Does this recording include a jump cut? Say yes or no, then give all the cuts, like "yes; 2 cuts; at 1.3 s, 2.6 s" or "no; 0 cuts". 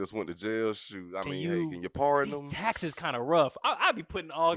no; 0 cuts